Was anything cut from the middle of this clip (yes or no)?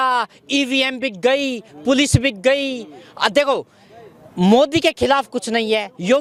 no